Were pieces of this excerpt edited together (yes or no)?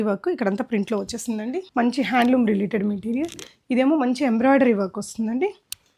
yes